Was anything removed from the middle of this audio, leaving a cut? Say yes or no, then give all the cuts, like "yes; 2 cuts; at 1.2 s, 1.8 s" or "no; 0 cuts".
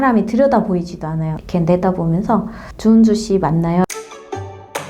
yes; 2 cuts; at 1.4 s, 3.8 s